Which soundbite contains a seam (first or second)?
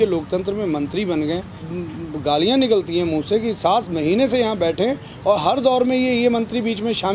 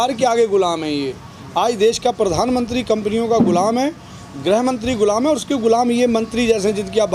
first